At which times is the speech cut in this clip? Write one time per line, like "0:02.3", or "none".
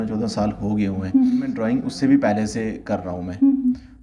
0:01.6